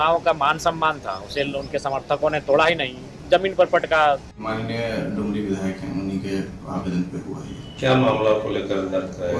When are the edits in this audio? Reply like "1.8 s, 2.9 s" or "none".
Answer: 4.5 s